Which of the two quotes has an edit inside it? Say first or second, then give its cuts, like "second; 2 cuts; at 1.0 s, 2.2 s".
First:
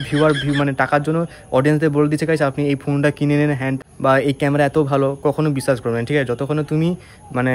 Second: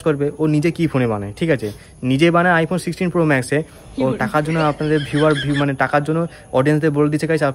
first; 1 cut; at 3.8 s